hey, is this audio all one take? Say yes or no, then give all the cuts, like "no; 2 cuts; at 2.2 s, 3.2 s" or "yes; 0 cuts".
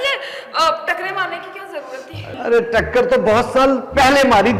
yes; 0 cuts